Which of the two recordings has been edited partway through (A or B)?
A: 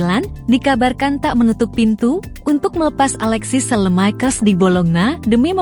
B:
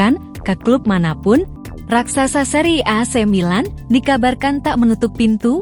B